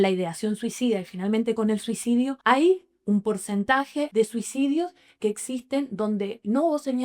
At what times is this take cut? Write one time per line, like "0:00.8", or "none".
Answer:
0:02.4
0:04.1